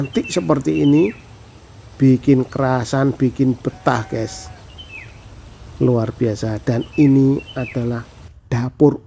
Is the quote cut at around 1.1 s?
no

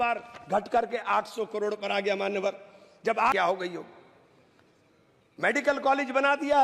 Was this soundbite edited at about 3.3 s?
yes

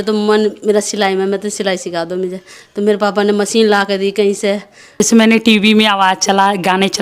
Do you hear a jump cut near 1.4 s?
no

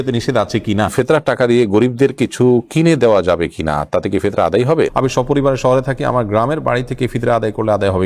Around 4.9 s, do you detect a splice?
yes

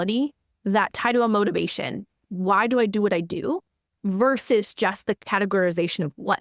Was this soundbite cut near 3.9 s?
no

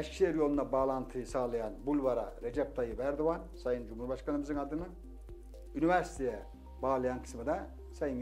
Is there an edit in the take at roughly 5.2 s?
no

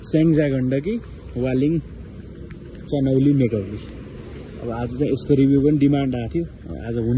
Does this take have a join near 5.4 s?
no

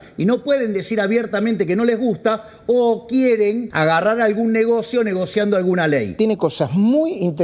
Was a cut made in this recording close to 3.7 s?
yes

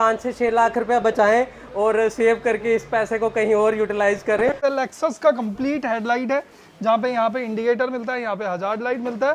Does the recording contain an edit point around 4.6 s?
yes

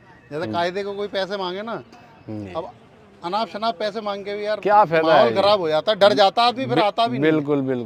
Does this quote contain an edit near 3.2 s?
no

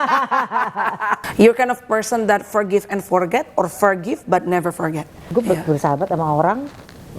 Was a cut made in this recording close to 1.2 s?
yes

